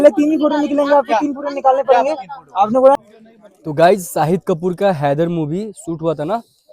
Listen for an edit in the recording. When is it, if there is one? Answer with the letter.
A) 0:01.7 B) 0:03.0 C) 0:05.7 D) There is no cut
B